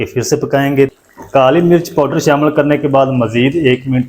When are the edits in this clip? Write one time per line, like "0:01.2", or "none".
0:00.9

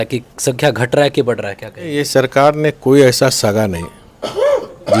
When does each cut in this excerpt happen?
0:01.9

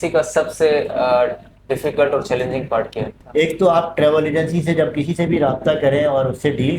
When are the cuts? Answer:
0:03.2

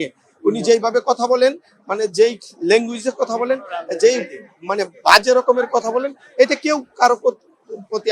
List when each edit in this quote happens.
none

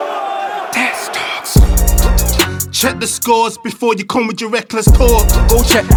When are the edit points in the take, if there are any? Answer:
none

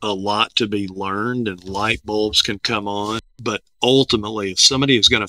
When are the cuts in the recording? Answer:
0:03.3

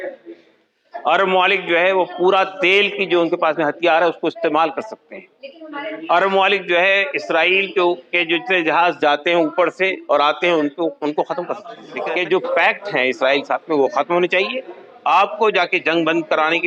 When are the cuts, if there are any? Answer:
0:11.8

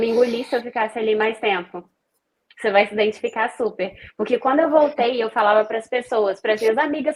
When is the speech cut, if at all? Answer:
none

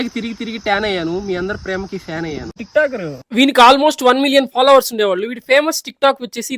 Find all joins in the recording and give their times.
0:02.6

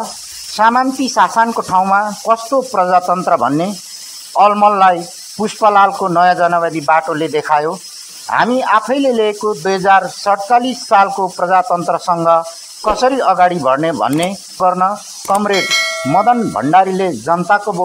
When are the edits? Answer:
0:14.6

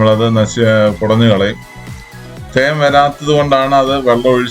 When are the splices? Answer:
none

